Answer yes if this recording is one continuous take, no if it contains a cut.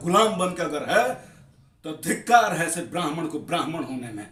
yes